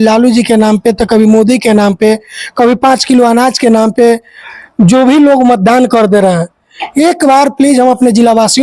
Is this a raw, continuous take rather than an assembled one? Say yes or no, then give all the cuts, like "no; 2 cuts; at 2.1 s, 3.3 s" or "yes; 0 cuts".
yes; 0 cuts